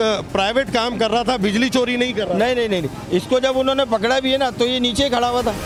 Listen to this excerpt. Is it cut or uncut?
uncut